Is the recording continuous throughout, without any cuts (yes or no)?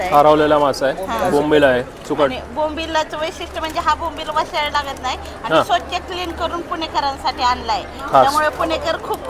yes